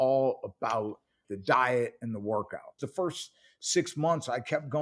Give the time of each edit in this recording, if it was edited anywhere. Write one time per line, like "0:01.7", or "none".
0:01.2
0:02.8